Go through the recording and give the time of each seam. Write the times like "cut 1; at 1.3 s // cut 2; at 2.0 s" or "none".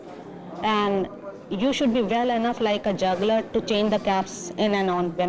none